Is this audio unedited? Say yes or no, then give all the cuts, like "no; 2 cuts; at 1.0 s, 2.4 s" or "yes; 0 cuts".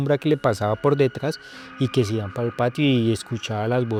yes; 0 cuts